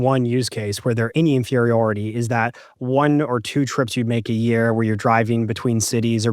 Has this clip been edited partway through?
yes; 1 cut; at 1.1 s

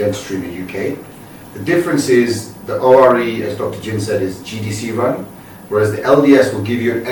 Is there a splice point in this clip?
no; 0 cuts

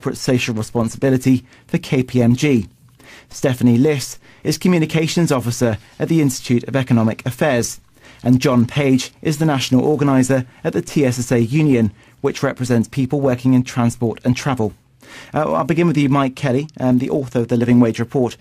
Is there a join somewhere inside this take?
yes; 1 cut; at 13.9 s

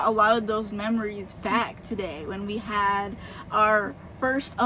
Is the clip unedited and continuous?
yes; 0 cuts

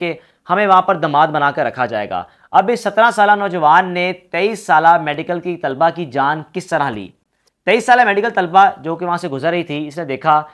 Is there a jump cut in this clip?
no; 0 cuts

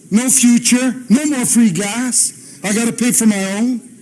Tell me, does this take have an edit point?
no; 0 cuts

